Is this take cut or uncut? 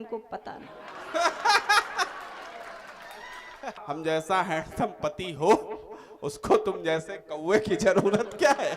cut